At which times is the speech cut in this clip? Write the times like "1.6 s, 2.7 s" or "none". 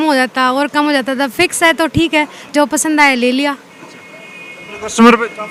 none